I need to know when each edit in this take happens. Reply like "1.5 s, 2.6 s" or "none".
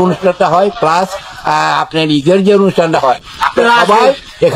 none

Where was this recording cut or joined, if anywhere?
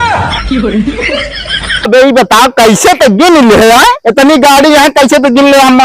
1.9 s

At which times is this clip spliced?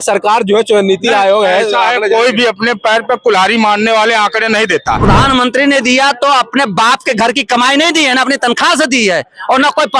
5.0 s

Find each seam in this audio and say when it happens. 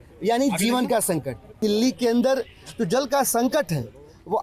1.6 s

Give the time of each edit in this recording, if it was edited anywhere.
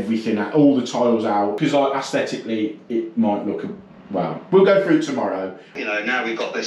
1.6 s, 5.7 s

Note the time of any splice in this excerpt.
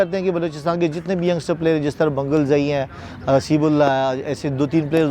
none

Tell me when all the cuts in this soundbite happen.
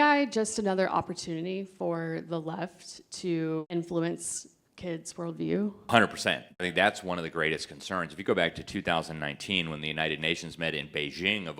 3.7 s, 5.9 s, 6.6 s

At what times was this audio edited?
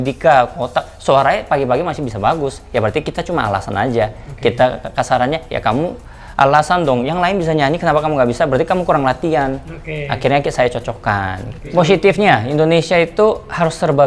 none

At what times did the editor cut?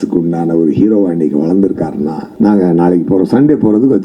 2.2 s

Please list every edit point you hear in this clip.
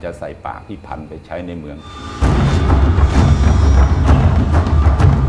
none

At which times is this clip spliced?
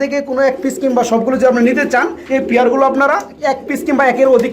2.2 s

